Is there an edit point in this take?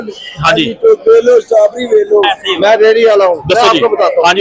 yes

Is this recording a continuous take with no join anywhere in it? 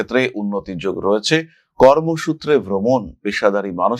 yes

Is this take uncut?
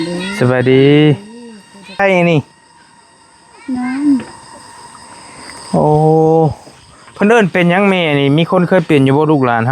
no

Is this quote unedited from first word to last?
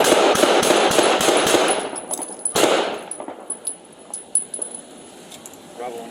no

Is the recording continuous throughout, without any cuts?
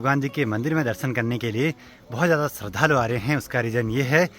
yes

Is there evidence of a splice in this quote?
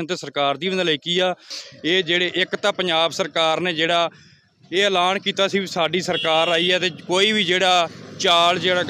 yes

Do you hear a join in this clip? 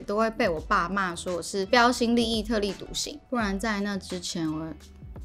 yes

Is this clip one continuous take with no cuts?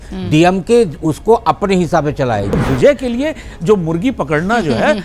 no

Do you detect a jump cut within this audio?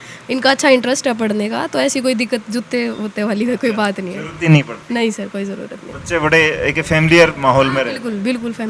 no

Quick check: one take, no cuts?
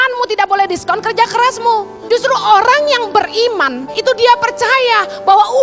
no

